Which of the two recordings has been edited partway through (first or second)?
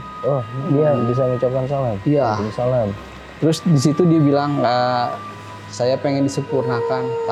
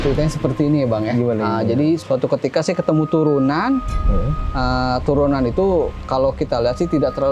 second